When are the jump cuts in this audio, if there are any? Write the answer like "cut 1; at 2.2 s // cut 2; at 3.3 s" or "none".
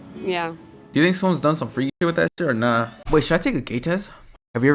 cut 1; at 3.0 s